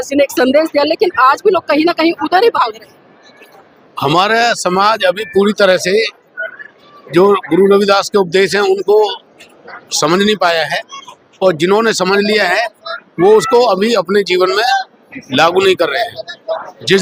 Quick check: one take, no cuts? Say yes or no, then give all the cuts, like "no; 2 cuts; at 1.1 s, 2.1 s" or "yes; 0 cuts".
yes; 0 cuts